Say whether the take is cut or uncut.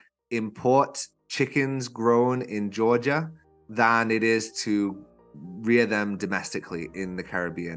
uncut